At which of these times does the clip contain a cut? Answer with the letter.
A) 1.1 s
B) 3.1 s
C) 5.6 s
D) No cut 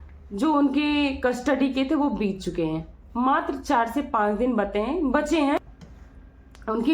C